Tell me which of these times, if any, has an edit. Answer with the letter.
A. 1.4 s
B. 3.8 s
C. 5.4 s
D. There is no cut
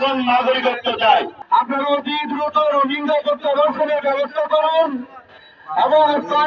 A